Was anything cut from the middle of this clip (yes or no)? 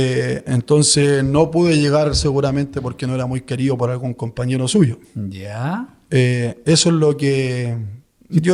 no